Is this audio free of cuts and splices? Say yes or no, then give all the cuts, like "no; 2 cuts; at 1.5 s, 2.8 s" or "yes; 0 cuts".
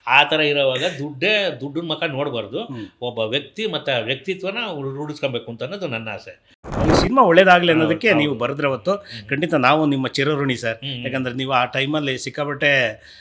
no; 1 cut; at 6.8 s